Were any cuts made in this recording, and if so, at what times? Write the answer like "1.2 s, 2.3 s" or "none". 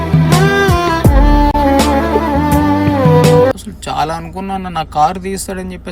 3.7 s